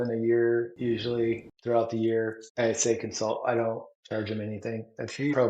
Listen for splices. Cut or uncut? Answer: cut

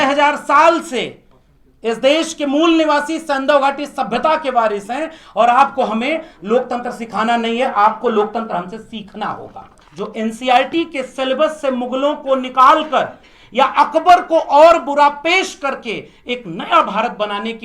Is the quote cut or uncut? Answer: cut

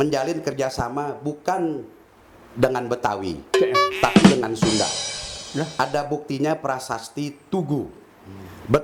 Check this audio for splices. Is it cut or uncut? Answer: uncut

